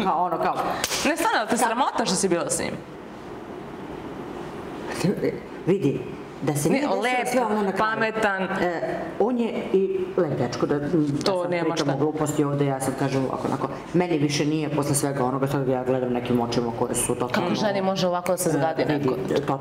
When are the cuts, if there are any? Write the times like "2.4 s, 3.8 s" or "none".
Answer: none